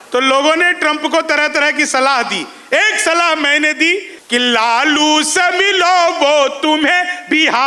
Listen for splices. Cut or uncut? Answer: cut